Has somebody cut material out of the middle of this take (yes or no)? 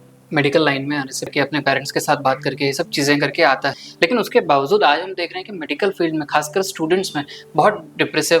yes